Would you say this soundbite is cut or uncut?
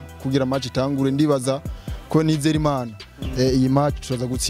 uncut